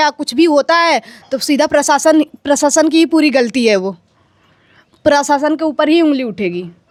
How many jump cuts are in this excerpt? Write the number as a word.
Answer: zero